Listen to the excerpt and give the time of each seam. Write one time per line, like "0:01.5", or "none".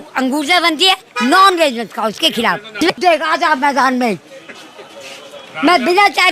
0:02.8